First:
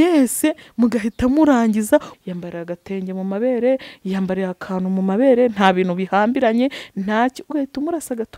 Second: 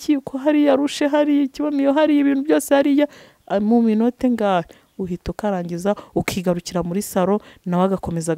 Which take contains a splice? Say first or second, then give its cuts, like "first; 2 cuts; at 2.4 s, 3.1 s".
first; 1 cut; at 2.1 s